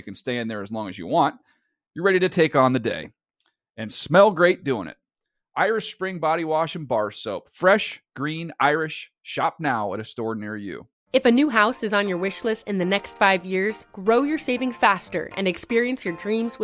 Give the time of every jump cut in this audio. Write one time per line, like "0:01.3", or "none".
0:10.9